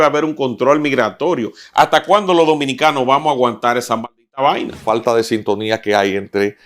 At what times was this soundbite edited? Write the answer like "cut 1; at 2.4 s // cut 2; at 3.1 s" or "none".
cut 1; at 4.8 s